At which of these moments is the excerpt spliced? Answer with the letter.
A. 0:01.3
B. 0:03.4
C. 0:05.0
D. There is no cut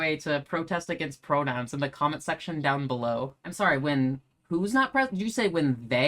B